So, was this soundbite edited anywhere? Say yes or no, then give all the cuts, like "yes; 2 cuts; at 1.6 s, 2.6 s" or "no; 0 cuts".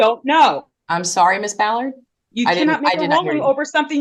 no; 0 cuts